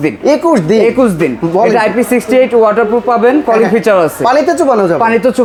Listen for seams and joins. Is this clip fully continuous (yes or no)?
yes